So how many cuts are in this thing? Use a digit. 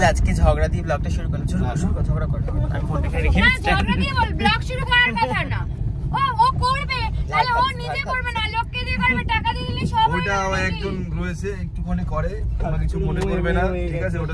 0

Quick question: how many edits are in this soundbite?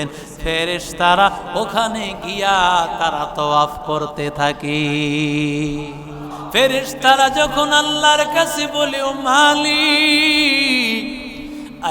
1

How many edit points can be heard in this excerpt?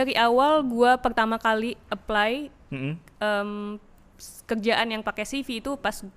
0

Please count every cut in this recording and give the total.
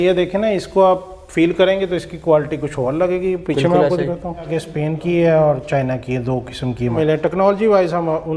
2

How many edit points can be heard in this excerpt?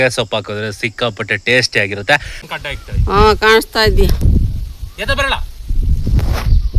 1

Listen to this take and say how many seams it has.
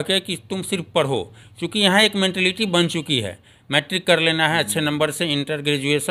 0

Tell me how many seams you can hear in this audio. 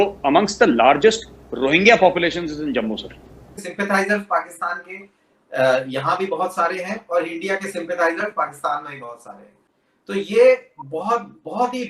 2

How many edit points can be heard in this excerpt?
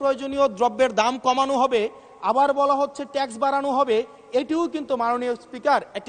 0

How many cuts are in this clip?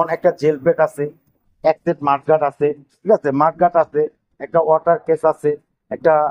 1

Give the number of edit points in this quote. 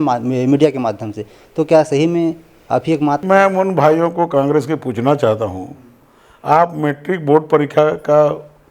0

